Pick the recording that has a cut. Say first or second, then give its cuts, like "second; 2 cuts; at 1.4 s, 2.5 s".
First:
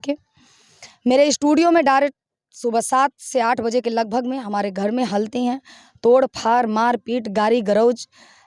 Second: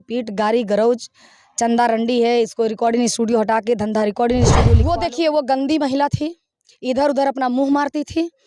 second; 1 cut; at 4.8 s